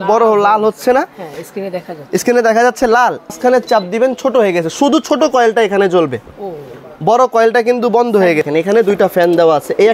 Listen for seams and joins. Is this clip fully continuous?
no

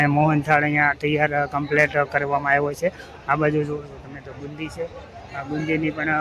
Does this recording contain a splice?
no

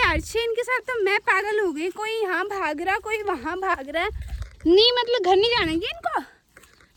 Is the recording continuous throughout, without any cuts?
yes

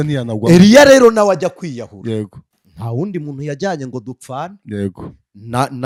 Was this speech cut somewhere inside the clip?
no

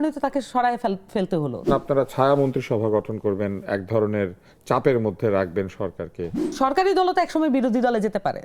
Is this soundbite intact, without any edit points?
no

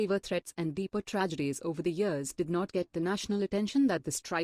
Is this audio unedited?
yes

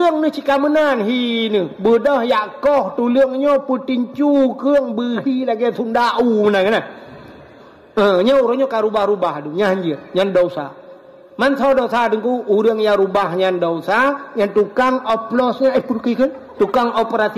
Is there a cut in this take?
no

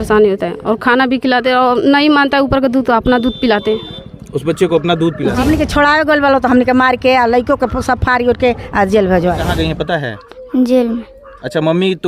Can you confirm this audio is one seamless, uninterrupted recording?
no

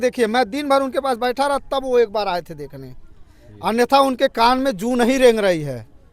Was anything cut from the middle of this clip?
no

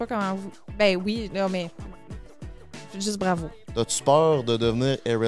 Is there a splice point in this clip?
yes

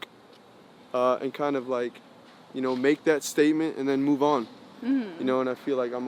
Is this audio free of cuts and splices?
yes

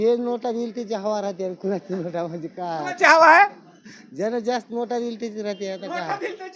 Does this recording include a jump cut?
no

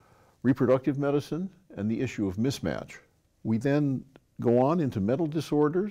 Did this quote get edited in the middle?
yes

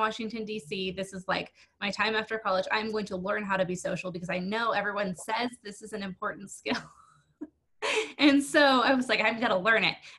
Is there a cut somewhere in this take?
no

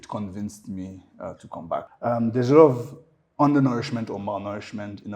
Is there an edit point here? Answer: yes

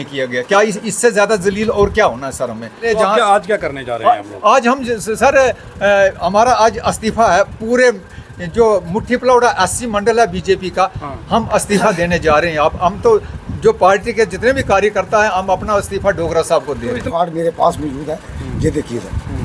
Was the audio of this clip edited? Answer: yes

